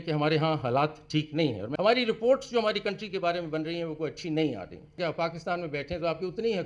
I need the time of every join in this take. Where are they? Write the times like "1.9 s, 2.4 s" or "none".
1.6 s, 5.0 s